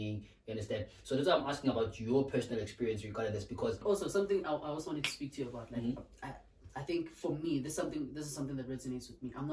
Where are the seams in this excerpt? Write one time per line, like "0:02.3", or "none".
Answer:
0:03.8